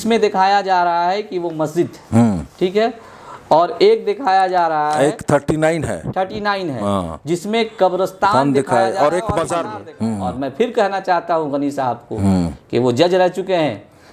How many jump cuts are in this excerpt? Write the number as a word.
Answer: one